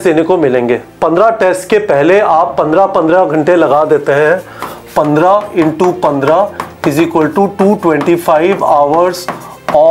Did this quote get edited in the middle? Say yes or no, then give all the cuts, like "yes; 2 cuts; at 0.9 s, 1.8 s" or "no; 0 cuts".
no; 0 cuts